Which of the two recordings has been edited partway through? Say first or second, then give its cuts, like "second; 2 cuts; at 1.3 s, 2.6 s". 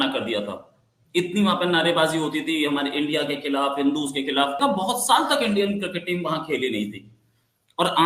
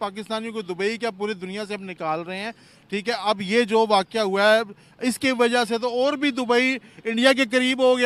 first; 1 cut; at 4.6 s